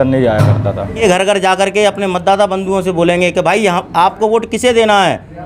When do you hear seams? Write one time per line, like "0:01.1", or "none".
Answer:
0:01.0